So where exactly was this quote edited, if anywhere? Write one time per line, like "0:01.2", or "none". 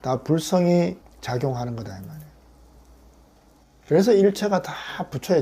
0:01.1